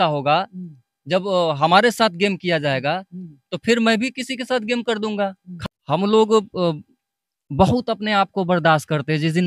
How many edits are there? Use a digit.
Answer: 1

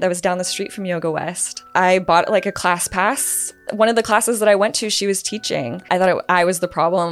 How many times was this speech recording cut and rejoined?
3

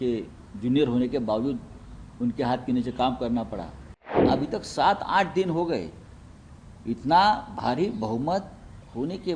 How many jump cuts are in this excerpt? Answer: 1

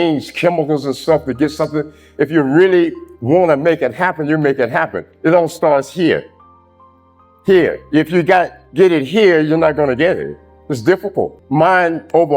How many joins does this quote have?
1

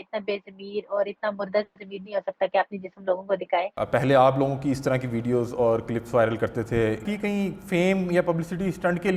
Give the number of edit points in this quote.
2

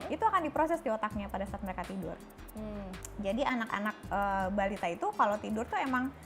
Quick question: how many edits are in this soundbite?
0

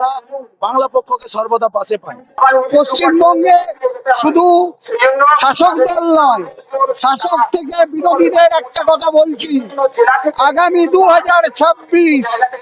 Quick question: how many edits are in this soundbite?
1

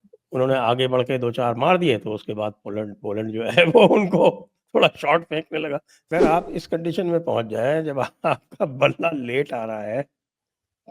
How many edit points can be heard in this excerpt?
1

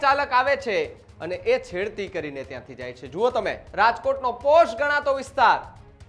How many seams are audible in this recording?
1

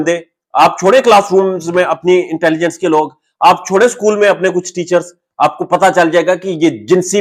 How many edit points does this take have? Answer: 0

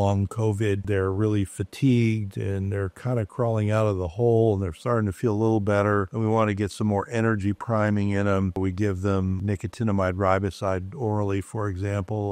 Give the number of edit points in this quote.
3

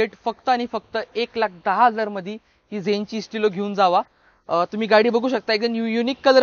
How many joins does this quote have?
0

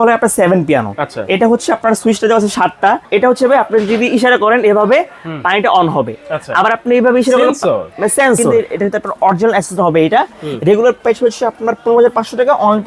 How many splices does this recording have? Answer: 2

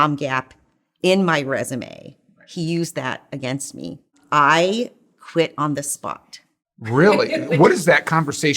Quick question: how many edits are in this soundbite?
1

